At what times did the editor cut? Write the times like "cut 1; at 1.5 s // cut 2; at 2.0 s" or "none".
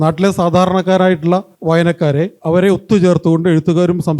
cut 1; at 1.5 s // cut 2; at 2.4 s